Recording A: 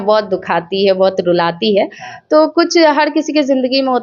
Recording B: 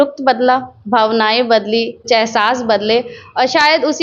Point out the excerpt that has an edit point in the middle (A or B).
B